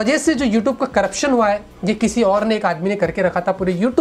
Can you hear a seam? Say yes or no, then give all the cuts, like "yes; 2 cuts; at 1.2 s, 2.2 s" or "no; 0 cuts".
no; 0 cuts